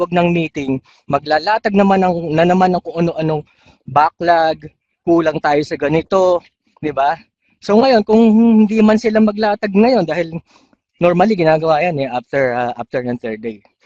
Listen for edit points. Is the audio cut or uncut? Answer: uncut